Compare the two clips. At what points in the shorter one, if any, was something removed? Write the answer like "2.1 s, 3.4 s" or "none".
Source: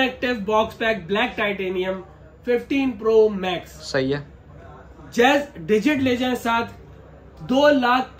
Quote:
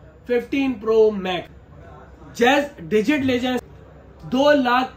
1.6 s, 3.6 s